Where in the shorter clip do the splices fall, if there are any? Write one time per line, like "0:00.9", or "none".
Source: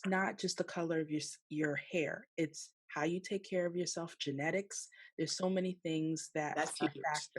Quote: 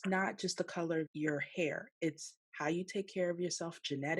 0:01.1